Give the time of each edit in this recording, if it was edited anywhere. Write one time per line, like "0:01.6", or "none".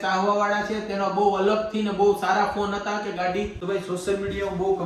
0:03.6